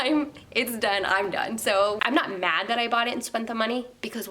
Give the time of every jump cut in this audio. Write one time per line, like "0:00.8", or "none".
0:02.0